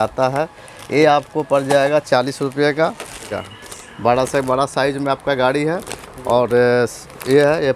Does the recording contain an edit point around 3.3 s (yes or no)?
yes